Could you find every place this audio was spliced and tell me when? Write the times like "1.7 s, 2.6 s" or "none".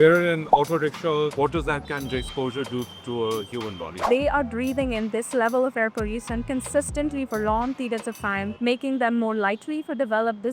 1.3 s, 4.0 s, 8.5 s